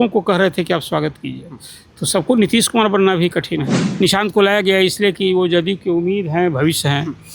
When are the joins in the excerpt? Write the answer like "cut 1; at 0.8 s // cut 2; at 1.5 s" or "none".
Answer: cut 1; at 3.8 s